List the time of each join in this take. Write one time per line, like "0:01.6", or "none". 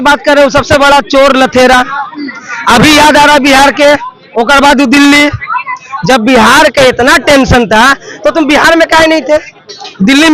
none